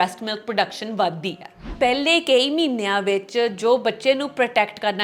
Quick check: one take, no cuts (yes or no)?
no